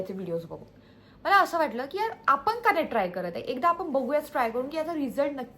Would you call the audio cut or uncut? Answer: uncut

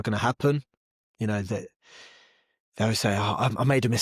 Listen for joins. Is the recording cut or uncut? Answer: uncut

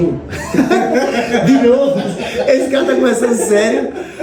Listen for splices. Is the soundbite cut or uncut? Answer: uncut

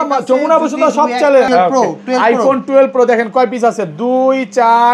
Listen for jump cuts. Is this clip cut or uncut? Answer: cut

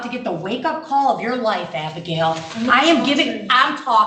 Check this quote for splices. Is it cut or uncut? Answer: uncut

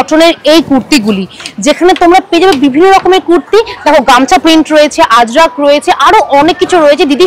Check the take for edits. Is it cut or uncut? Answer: uncut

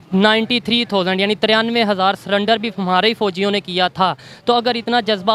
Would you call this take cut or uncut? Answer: uncut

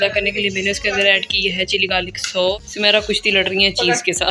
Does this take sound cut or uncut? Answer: cut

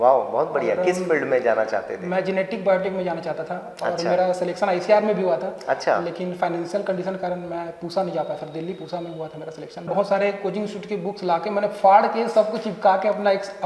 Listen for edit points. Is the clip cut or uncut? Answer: cut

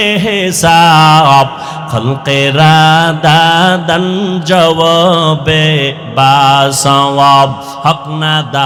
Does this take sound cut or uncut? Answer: uncut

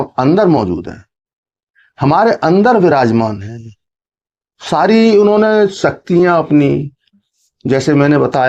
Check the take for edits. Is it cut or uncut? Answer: uncut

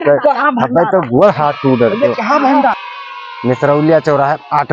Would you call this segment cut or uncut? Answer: cut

